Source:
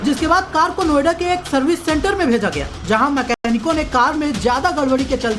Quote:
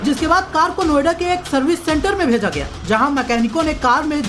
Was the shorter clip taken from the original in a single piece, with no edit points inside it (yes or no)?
no